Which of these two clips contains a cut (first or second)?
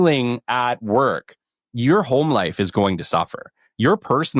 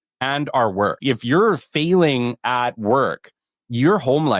second